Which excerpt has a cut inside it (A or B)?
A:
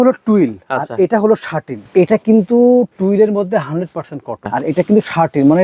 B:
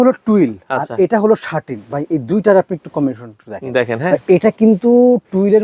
A